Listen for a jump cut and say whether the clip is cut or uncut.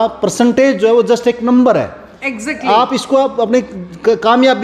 uncut